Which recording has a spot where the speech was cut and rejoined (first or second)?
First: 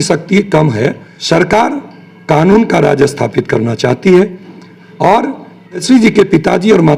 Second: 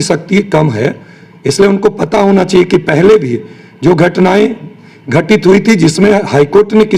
first